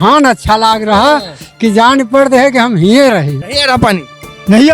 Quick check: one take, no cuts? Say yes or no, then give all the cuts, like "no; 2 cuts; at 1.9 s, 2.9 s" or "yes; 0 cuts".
no; 1 cut; at 3.4 s